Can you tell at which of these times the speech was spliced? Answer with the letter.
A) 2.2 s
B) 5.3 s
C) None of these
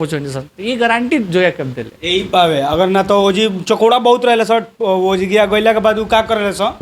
C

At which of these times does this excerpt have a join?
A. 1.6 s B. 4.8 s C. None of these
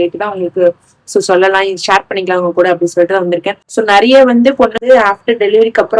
B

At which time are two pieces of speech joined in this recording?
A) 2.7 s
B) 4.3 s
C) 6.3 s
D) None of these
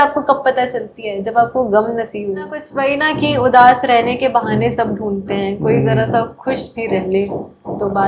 A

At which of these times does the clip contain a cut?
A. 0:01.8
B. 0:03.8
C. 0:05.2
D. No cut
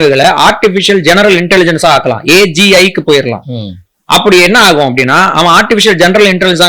D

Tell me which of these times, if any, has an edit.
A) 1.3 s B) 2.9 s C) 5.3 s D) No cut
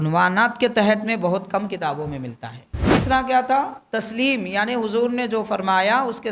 B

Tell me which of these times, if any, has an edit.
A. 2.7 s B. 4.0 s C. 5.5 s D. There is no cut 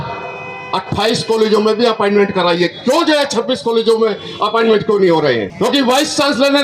C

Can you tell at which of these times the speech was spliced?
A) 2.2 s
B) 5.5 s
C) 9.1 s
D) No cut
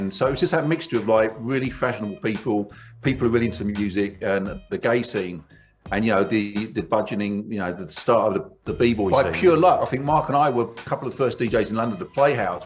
C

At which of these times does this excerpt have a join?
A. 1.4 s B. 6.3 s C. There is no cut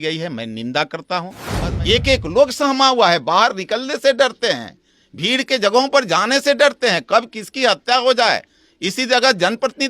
A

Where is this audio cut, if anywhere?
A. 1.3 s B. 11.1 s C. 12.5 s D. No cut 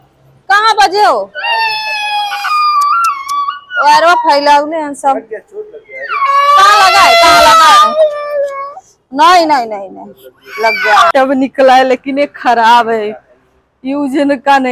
B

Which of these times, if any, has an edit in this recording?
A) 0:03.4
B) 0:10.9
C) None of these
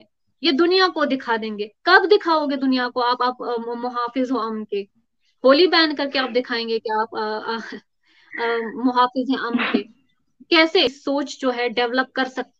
B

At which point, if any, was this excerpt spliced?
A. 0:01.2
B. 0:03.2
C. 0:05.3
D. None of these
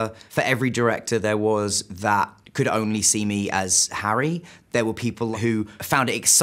C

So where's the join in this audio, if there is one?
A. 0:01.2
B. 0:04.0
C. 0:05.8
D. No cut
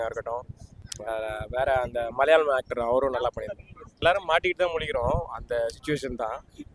B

